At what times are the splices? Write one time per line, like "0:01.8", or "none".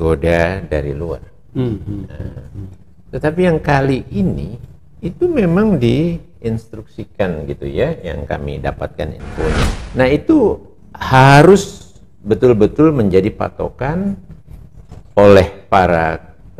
0:09.8

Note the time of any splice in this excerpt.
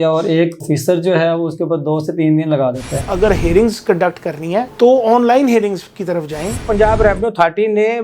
0:03.1
0:06.7

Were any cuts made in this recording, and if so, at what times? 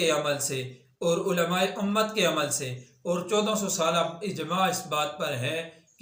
none

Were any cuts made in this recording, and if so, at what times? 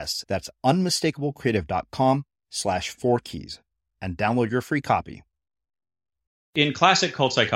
0:06.4

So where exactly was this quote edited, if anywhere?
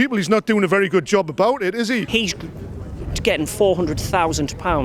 0:02.1

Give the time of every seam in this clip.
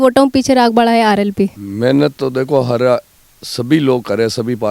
0:01.6

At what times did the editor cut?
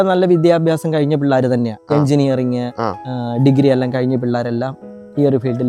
none

